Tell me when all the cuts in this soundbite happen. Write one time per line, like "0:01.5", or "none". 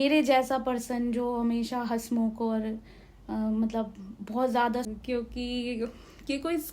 0:04.9